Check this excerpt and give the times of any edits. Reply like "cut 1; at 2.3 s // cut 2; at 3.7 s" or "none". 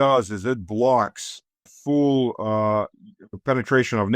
cut 1; at 1.8 s